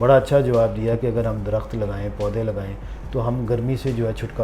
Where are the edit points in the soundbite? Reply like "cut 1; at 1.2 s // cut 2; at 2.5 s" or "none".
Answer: none